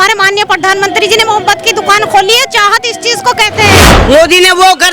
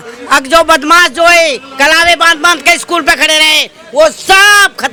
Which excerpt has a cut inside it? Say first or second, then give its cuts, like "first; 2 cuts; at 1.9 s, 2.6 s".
first; 1 cut; at 3.9 s